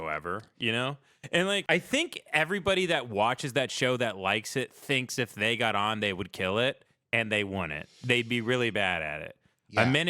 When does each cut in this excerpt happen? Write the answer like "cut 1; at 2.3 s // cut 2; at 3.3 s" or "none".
cut 1; at 1.6 s

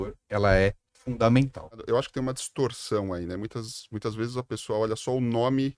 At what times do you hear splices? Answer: cut 1; at 1.8 s

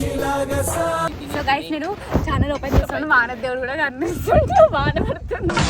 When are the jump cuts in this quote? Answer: cut 1; at 1.2 s

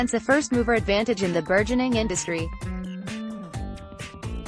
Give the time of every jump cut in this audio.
cut 1; at 3.0 s

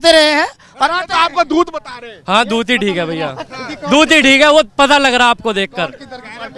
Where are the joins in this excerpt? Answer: none

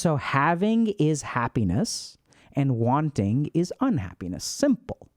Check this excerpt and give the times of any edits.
none

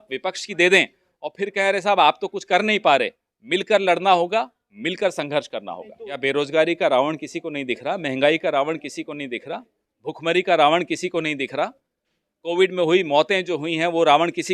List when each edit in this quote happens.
cut 1; at 6.2 s

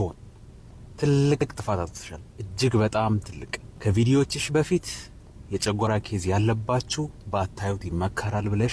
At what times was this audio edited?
none

